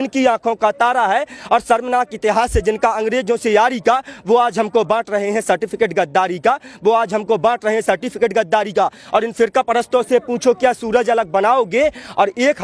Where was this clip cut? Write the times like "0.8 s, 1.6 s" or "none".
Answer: 9.0 s